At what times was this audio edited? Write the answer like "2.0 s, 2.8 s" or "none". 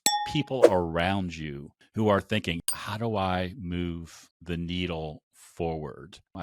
none